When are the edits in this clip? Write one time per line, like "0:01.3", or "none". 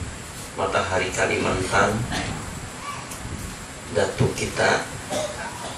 none